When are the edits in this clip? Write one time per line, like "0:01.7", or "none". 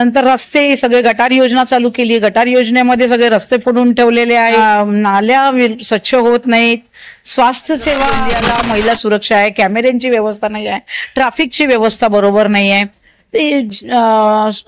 0:04.6
0:08.4